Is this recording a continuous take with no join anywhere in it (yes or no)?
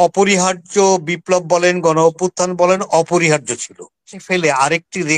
no